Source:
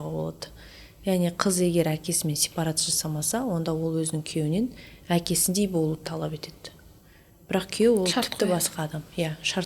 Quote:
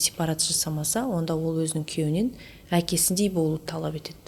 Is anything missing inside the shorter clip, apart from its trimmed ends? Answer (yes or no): no